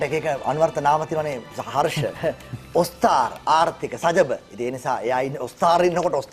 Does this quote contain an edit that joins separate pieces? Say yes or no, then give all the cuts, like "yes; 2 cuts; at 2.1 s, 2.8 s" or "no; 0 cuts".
no; 0 cuts